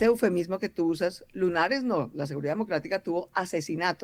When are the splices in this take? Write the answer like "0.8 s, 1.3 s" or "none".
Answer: none

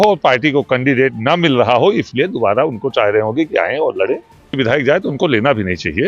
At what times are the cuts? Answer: 4.6 s

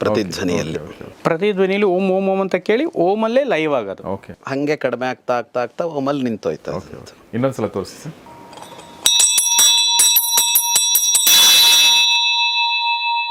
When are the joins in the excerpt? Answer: none

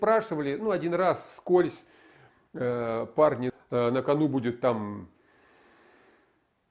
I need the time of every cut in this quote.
3.5 s

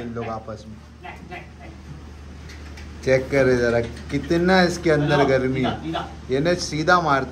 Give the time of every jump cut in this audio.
none

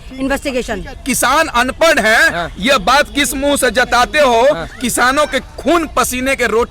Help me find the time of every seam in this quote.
0.9 s

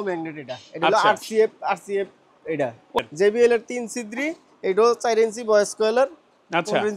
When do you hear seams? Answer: 3.0 s

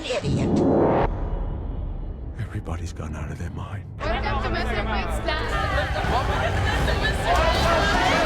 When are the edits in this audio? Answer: 4.0 s, 5.6 s

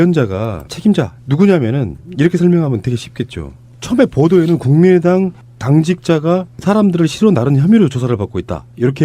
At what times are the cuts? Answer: 5.9 s

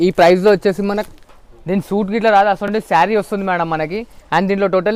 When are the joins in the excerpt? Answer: none

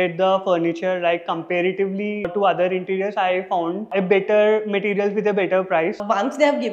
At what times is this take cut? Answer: 2.3 s, 6.0 s

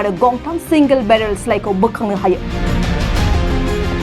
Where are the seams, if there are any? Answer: 2.5 s

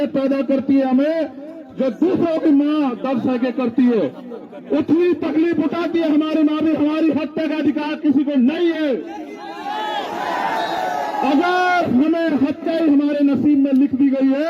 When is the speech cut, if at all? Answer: none

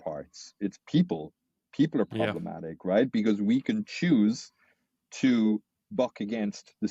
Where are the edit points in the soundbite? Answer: none

